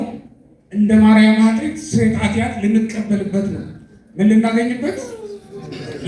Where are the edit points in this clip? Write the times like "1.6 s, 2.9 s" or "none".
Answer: none